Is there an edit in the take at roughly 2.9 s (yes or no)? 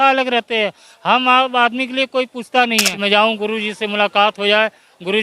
yes